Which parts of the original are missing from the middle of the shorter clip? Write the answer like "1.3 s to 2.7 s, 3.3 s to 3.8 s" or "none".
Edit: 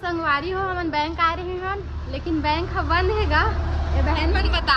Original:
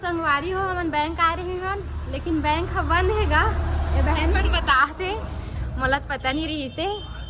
none